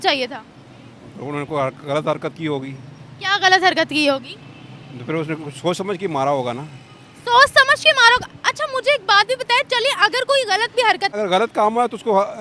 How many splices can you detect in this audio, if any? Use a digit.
1